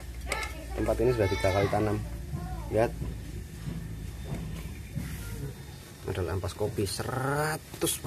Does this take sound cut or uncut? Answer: cut